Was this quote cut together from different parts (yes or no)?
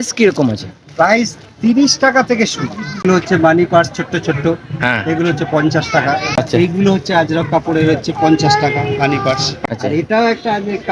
yes